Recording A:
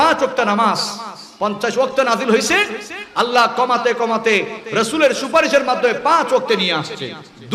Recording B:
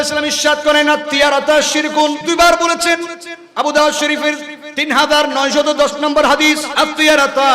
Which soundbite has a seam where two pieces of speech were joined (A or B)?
B